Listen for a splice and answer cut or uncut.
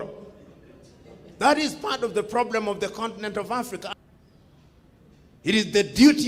cut